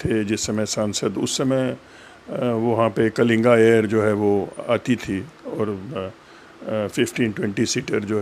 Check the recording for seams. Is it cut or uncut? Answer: uncut